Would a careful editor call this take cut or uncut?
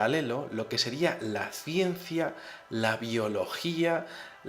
cut